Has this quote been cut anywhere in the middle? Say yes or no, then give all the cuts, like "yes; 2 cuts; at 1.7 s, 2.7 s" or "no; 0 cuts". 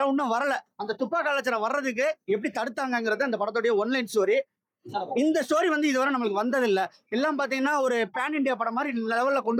no; 0 cuts